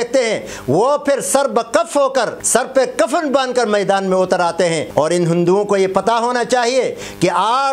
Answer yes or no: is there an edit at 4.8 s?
yes